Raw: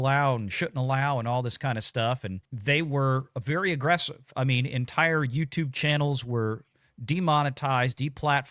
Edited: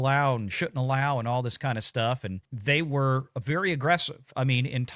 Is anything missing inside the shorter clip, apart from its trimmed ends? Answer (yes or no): no